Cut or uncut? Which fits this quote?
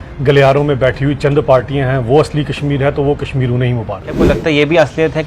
cut